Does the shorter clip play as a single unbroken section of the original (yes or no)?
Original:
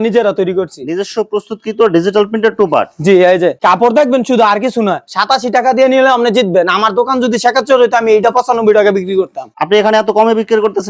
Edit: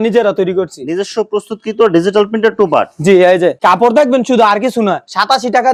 yes